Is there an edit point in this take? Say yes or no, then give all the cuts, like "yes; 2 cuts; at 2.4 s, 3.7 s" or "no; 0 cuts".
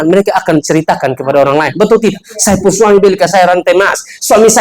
no; 0 cuts